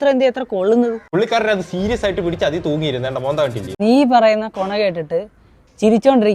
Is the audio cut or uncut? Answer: cut